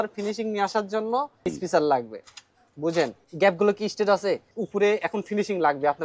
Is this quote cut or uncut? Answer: cut